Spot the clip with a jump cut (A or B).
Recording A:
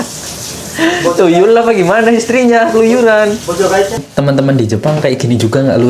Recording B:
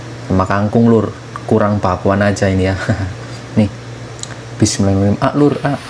A